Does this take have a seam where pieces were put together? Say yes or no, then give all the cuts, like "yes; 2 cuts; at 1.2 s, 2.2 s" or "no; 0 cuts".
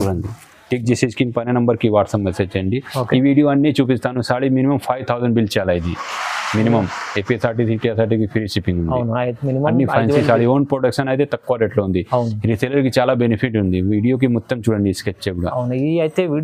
no; 0 cuts